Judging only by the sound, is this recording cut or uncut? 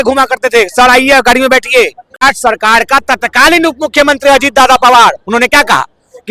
cut